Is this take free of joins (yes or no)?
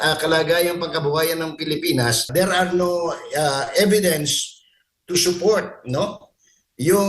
no